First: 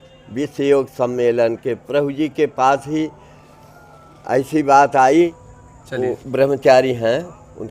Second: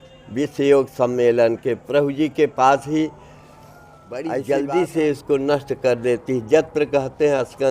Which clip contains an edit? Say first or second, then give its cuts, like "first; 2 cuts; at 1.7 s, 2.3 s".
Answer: second; 1 cut; at 4.3 s